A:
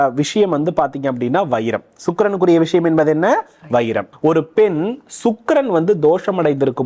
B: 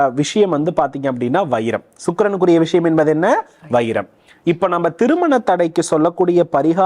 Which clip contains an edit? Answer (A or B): A